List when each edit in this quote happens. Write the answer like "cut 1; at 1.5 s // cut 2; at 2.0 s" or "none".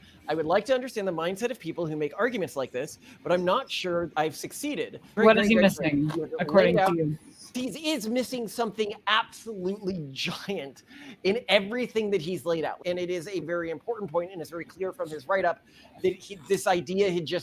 cut 1; at 4.1 s // cut 2; at 5.1 s // cut 3; at 7.5 s // cut 4; at 12.8 s